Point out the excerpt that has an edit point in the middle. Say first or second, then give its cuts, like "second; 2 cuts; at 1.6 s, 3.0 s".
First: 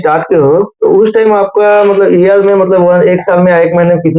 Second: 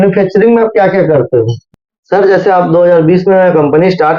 second; 1 cut; at 1.6 s